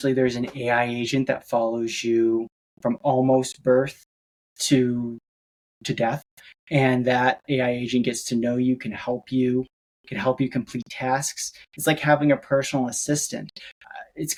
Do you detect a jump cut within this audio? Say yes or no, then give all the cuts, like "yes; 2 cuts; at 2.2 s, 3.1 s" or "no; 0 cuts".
no; 0 cuts